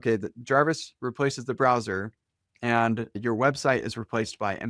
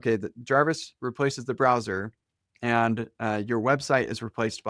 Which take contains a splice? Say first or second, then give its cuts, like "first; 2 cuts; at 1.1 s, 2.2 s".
first; 1 cut; at 3.2 s